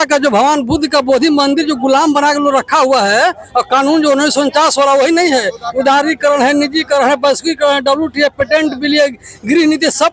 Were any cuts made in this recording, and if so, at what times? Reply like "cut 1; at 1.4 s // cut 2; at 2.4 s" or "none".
none